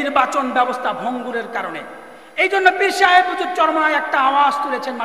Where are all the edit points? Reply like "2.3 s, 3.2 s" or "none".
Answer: none